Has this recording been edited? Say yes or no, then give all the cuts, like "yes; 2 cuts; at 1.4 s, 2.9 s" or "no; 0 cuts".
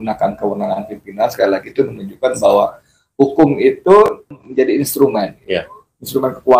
yes; 1 cut; at 4.4 s